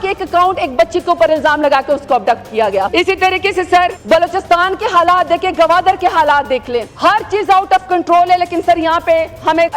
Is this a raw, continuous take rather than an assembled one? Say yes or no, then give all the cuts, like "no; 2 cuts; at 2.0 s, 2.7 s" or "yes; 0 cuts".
yes; 0 cuts